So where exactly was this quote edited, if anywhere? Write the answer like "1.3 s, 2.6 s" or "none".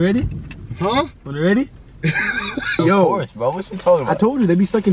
2.8 s